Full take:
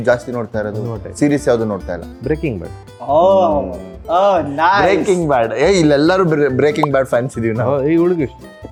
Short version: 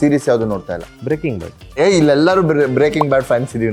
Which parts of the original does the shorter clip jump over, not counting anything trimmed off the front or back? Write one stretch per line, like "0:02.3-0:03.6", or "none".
0:02.9-0:05.5